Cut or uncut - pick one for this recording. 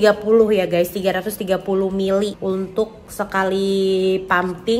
uncut